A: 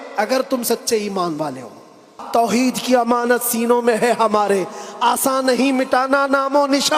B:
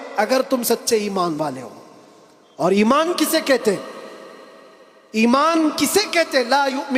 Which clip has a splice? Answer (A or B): A